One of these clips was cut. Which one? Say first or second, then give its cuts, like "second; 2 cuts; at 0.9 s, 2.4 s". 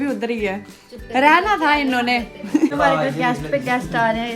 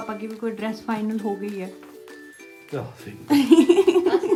first; 1 cut; at 2.7 s